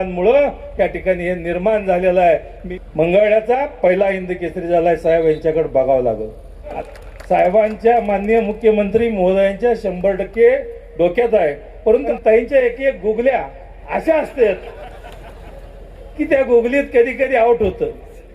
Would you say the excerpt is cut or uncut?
cut